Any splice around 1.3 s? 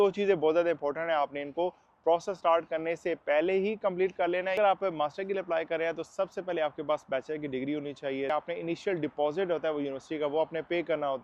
no; 2 cuts; at 4.5 s, 8.3 s

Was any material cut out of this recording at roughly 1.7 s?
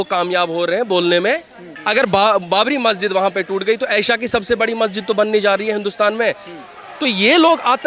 yes; 1 cut; at 1.7 s

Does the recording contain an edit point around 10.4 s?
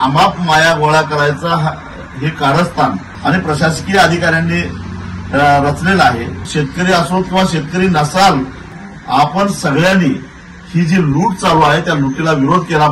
no; 3 cuts; at 3.1 s, 6.5 s, 8.6 s

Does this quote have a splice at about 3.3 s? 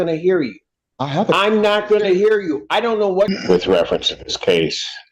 yes; 1 cut; at 3.3 s

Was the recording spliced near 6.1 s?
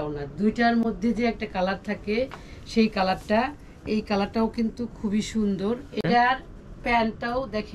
yes; 1 cut; at 6.1 s

